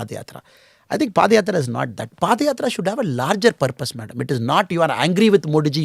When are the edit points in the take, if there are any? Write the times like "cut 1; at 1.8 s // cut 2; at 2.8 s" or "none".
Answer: cut 1; at 2.1 s